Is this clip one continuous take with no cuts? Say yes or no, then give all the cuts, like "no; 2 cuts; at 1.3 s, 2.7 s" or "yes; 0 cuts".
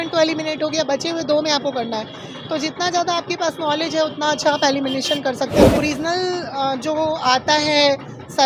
no; 1 cut; at 5.8 s